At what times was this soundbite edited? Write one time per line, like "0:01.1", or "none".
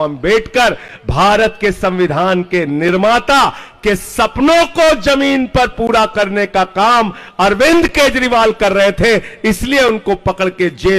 none